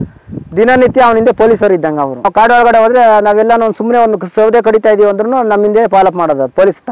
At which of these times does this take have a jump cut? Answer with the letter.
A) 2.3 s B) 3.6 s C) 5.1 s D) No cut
A